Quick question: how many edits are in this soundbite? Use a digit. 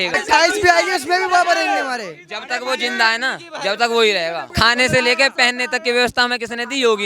1